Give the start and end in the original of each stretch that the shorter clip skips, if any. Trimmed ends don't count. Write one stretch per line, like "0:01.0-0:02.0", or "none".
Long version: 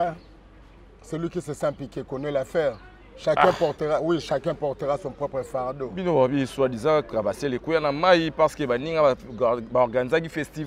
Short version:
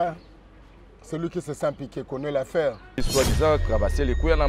0:03.1-0:06.5